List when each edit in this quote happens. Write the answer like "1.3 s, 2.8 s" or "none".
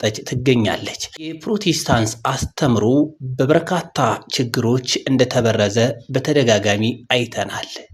1.3 s